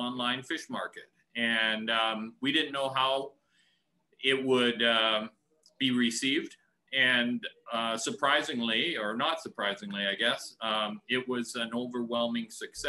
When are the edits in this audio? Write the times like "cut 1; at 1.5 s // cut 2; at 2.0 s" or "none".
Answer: none